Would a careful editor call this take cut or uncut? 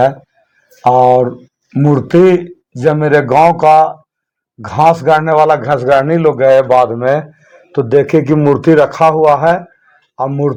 uncut